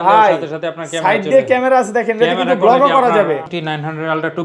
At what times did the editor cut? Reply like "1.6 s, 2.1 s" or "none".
3.5 s